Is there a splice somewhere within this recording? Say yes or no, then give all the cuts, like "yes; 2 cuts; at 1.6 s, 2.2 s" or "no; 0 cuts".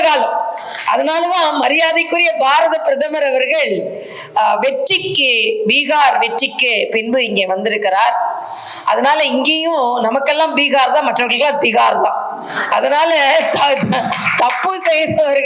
no; 0 cuts